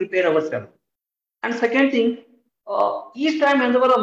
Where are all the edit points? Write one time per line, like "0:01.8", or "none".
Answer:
none